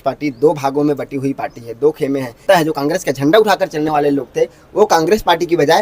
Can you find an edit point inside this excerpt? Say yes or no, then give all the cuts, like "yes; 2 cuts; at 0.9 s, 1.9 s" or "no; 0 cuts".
yes; 1 cut; at 2.4 s